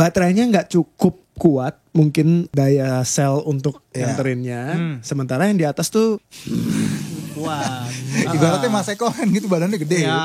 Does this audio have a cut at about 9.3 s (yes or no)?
no